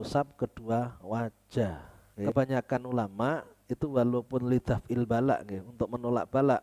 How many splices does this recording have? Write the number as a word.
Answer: one